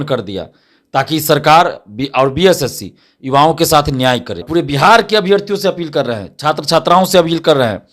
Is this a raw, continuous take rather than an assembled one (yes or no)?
no